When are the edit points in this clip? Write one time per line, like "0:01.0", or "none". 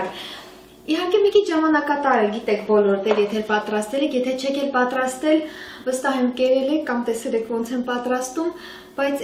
none